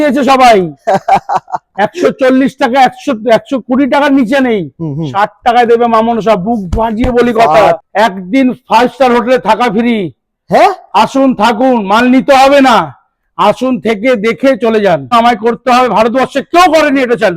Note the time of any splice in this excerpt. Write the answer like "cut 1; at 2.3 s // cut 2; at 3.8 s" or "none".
cut 1; at 7.8 s // cut 2; at 15.1 s